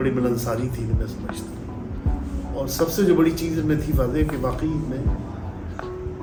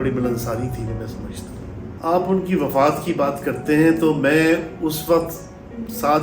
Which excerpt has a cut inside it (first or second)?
second